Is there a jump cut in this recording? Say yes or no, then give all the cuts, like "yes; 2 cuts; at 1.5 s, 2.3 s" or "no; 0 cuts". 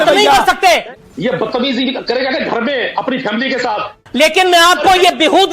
yes; 2 cuts; at 0.9 s, 3.9 s